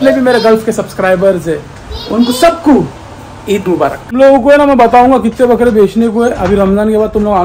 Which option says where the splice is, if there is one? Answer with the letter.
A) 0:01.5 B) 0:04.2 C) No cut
B